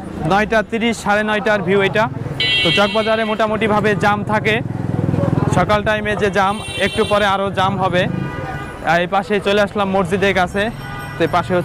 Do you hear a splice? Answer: no; 0 cuts

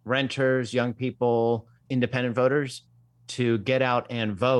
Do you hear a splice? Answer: no; 0 cuts

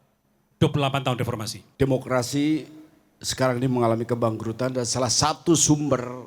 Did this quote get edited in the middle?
yes; 1 cut; at 1.6 s

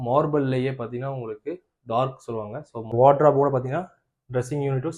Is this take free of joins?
no; 1 cut; at 2.9 s

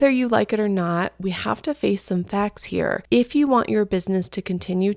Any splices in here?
yes; 1 cut; at 3.0 s

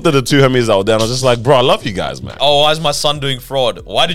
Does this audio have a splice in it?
yes; 1 cut; at 2.2 s

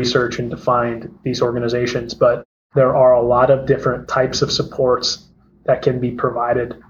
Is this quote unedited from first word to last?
no; 1 cut; at 2.5 s

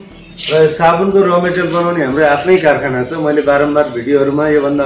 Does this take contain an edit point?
no; 0 cuts

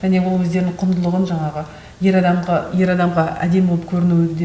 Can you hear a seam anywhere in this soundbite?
no; 0 cuts

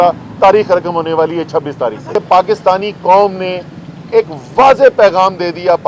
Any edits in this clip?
yes; 1 cut; at 2.1 s

